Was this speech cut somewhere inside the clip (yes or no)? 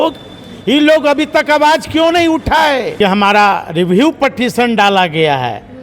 yes